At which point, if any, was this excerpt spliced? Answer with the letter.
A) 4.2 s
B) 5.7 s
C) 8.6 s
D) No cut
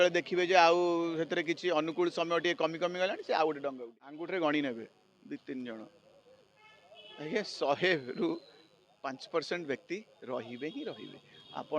A